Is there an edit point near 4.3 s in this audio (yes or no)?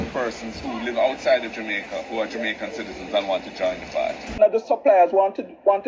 yes